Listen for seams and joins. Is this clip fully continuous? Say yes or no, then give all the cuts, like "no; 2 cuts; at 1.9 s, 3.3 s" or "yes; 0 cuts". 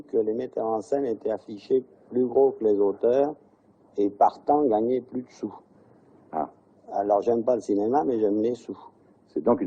yes; 0 cuts